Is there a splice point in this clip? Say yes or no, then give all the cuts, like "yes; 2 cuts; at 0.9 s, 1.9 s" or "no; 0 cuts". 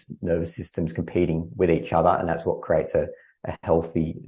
no; 0 cuts